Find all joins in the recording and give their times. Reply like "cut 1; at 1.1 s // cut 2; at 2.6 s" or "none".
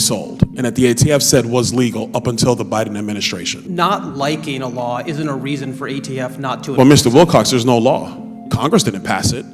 cut 1; at 3.5 s